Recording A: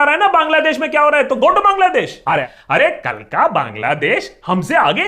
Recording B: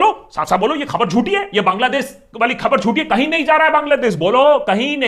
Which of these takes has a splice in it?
A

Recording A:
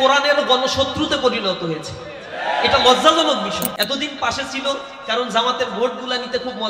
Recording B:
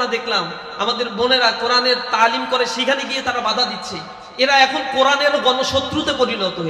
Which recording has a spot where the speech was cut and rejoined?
A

